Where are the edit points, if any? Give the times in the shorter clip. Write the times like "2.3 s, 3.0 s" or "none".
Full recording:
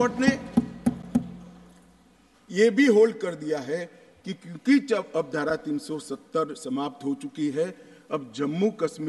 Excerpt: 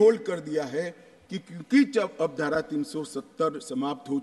none

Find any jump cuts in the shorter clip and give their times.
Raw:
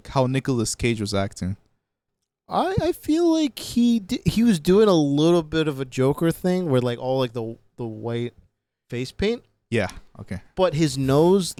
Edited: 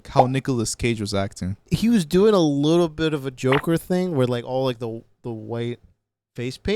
1.6 s

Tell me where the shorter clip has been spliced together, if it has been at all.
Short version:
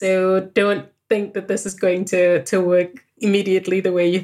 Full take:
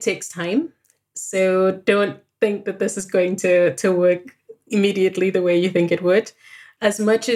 3.0 s

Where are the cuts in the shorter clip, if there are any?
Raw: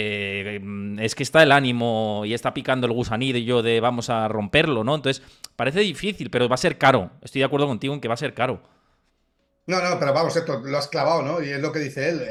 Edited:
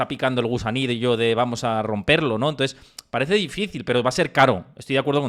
none

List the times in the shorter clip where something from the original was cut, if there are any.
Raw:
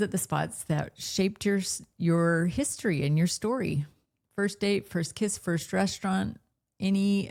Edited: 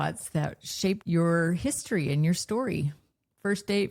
1.0 s

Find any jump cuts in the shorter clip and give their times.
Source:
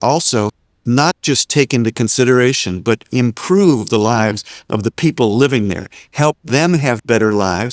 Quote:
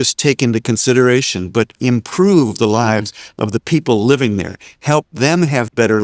none

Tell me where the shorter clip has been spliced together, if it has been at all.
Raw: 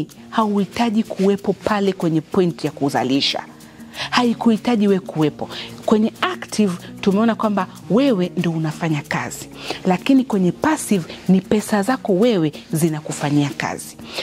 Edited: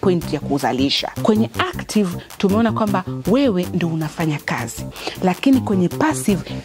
1.1 s

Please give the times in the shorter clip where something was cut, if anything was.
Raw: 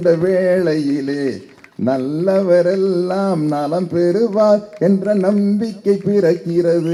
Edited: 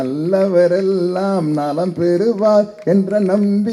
none

